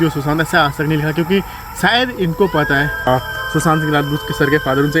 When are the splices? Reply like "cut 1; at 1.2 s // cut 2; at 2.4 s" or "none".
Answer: cut 1; at 3.1 s